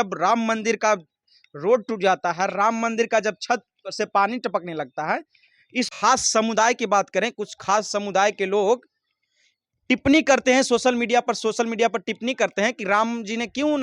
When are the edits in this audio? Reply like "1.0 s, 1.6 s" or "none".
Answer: 5.9 s